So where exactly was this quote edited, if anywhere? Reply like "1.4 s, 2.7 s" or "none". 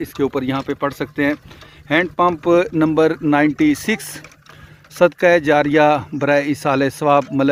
none